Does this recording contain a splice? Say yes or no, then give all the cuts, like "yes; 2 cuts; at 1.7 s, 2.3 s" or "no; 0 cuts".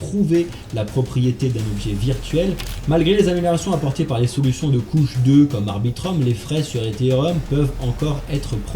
yes; 1 cut; at 2.7 s